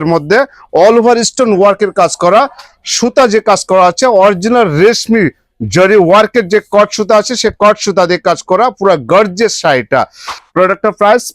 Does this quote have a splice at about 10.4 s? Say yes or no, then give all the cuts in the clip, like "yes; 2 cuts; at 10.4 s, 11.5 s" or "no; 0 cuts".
yes; 1 cut; at 10.4 s